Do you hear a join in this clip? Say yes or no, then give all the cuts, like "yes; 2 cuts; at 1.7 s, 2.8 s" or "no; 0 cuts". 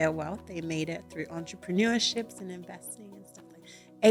no; 0 cuts